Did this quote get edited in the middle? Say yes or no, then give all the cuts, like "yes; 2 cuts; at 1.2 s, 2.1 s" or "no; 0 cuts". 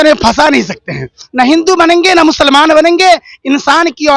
yes; 1 cut; at 1.2 s